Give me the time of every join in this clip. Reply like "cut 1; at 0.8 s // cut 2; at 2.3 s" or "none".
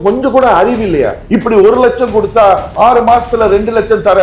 cut 1; at 1.2 s